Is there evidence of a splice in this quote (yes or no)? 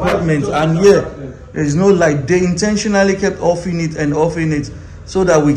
no